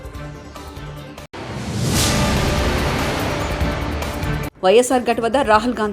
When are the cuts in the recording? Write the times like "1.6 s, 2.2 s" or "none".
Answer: 1.3 s, 4.5 s